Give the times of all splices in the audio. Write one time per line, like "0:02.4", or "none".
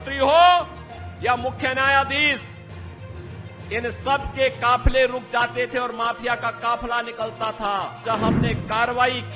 0:08.0